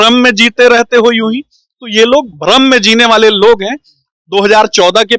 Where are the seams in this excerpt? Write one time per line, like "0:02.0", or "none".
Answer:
none

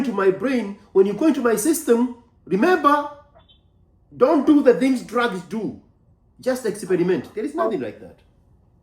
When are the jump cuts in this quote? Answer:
none

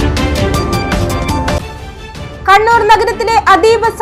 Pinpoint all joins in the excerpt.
0:01.5

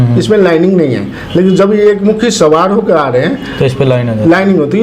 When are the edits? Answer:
none

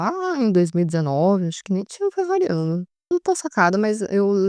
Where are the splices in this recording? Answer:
0:03.1

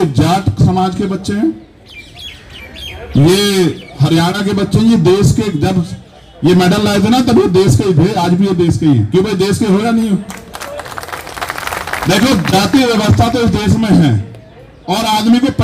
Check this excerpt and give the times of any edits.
none

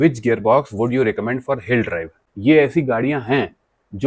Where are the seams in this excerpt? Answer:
0:02.2

